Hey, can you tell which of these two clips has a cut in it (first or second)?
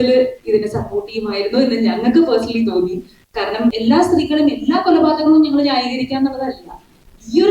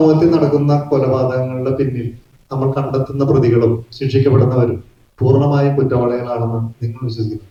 first